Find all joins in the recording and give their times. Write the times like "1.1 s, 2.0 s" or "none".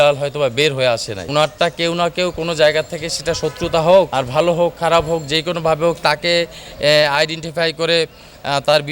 1.2 s, 4.2 s